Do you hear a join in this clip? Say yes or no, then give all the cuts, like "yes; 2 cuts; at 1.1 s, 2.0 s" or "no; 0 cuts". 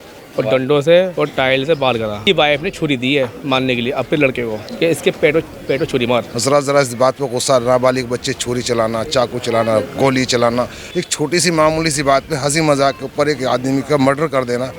yes; 4 cuts; at 2.2 s, 4.6 s, 6.3 s, 10.8 s